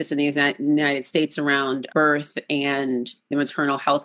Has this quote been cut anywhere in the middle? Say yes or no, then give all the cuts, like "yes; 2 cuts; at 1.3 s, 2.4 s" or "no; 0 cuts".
yes; 2 cuts; at 1.9 s, 3.3 s